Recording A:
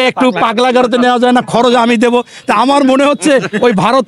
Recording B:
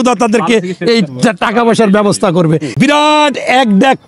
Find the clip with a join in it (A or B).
B